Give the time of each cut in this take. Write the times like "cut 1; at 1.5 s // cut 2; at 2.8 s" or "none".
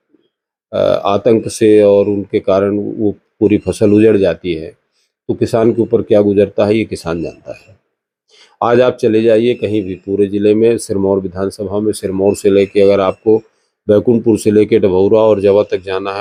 none